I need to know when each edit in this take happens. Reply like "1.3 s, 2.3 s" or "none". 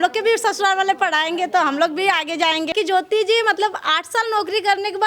2.7 s